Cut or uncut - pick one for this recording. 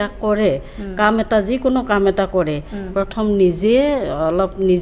uncut